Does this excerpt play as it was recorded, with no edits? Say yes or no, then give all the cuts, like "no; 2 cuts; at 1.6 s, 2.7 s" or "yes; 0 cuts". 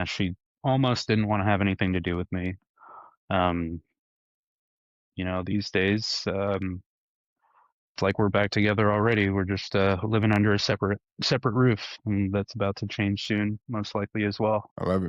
yes; 0 cuts